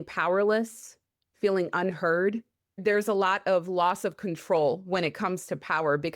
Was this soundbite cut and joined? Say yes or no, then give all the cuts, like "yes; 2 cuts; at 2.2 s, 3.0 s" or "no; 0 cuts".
yes; 1 cut; at 2.8 s